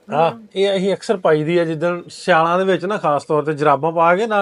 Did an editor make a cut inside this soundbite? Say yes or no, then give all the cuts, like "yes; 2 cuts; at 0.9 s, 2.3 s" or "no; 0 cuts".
no; 0 cuts